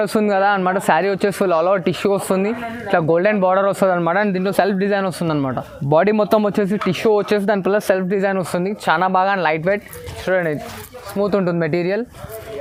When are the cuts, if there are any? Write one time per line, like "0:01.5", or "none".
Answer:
none